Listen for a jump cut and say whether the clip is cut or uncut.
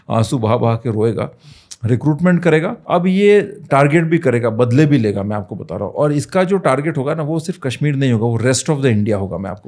cut